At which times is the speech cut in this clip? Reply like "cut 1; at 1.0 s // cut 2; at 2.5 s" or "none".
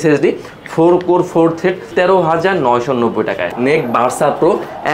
cut 1; at 1.9 s // cut 2; at 3.5 s

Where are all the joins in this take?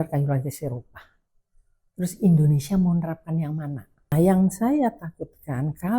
cut 1; at 4.1 s

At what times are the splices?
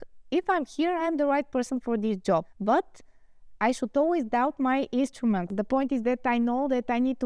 cut 1; at 2.5 s // cut 2; at 5.5 s

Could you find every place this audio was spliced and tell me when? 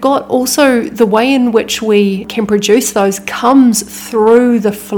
cut 1; at 2.3 s

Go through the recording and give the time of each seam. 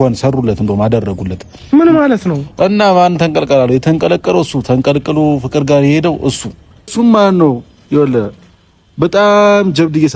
cut 1; at 6.9 s

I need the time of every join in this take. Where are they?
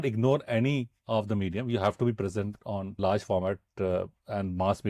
cut 1; at 0.9 s // cut 2; at 3.0 s

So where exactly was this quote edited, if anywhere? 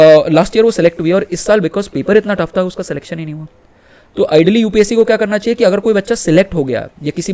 none

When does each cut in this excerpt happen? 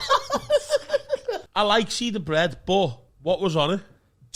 cut 1; at 1.4 s

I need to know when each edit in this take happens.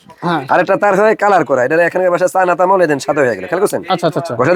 none

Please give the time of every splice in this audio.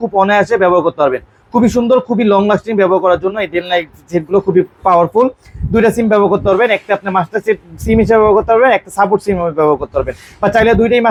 none

